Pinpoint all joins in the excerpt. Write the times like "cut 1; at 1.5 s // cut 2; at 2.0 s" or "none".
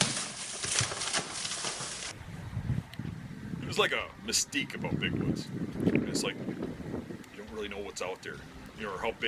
cut 1; at 2.2 s

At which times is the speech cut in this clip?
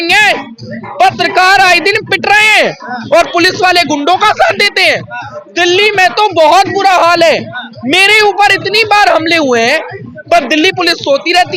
none

